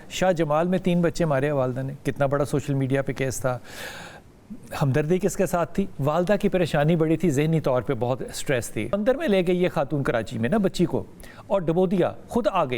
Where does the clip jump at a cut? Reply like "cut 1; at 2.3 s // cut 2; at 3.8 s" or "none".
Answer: cut 1; at 8.9 s